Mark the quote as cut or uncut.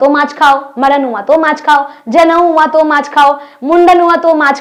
uncut